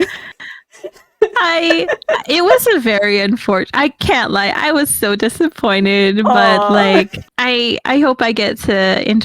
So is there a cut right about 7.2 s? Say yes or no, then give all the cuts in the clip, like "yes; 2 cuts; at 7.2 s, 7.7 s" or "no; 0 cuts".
yes; 1 cut; at 7.2 s